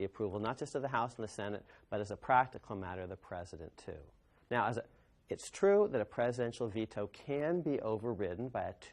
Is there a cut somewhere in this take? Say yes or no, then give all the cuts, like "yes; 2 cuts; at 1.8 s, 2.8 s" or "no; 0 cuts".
no; 0 cuts